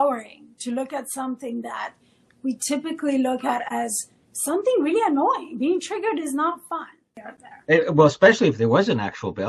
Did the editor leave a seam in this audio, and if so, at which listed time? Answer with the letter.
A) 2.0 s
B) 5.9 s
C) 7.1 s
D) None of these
C